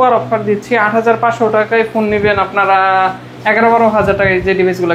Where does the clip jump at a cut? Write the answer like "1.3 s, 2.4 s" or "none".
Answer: none